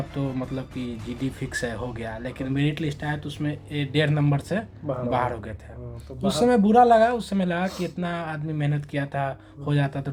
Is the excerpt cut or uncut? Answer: uncut